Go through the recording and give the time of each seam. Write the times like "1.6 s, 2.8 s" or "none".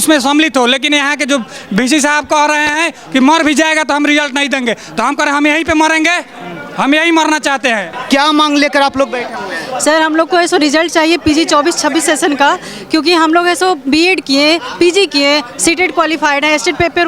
none